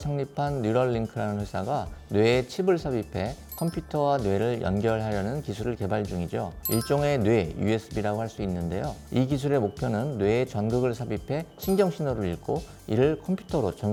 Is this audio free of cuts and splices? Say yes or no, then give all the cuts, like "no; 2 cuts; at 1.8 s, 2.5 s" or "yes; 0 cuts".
yes; 0 cuts